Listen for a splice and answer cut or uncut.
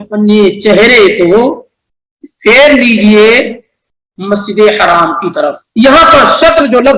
cut